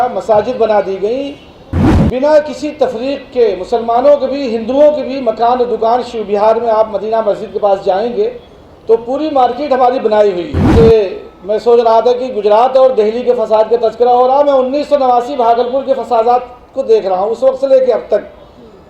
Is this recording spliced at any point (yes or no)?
yes